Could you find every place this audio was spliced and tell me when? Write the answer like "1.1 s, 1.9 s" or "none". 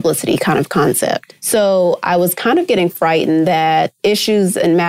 1.3 s, 3.9 s